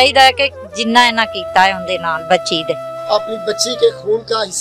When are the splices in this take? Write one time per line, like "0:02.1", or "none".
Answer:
0:02.9